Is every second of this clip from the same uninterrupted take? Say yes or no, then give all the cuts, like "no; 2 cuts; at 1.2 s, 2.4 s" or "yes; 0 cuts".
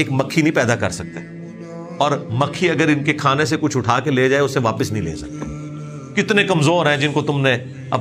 yes; 0 cuts